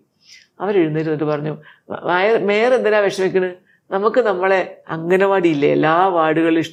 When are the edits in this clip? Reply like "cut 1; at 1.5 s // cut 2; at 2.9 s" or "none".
none